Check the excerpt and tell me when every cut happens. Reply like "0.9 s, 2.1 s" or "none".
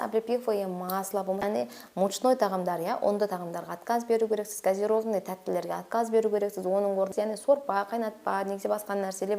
1.5 s, 7.4 s